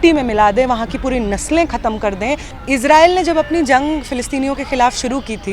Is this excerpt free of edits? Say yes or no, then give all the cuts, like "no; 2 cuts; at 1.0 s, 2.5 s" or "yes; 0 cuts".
no; 1 cut; at 2.5 s